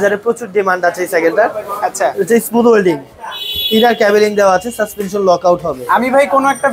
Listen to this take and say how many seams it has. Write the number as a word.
zero